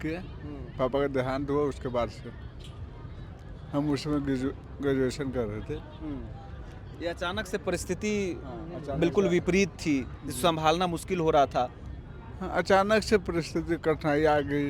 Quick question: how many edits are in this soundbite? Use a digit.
0